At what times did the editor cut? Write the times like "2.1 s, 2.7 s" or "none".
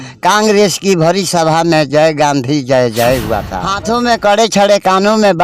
3.6 s